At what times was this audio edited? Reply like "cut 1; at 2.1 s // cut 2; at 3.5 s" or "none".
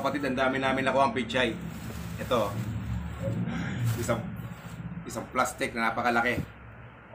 none